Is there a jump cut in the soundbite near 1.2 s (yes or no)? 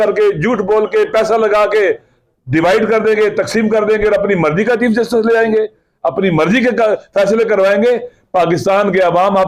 no